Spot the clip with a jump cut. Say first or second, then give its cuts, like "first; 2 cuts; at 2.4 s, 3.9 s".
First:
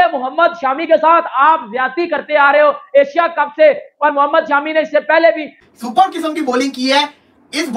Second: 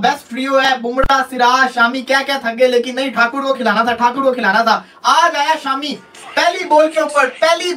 first; 1 cut; at 5.6 s